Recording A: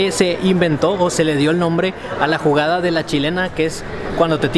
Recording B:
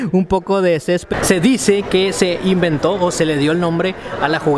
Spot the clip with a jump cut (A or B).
B